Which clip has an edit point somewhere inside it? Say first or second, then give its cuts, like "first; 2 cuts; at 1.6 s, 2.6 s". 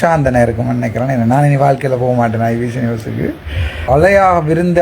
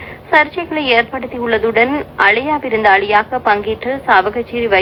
first; 1 cut; at 3.9 s